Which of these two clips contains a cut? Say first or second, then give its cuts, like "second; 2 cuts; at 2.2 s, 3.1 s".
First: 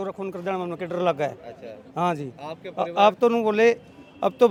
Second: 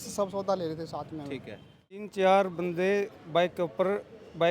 second; 1 cut; at 2.0 s